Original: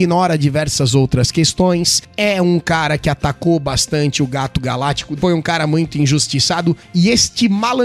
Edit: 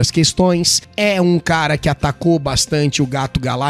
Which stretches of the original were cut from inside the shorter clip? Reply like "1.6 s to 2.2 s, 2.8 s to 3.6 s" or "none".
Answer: none